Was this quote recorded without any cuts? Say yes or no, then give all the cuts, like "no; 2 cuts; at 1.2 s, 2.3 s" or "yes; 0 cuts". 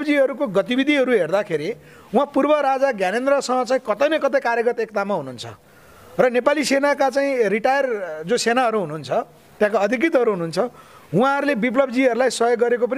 yes; 0 cuts